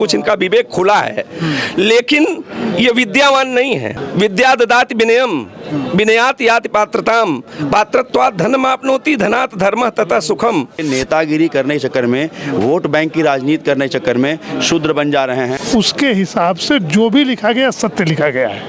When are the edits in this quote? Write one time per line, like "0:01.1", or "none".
0:04.0
0:10.8
0:15.6